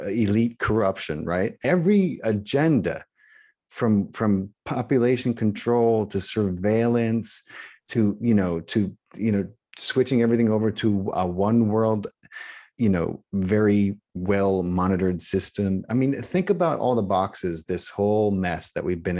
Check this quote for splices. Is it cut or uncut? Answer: cut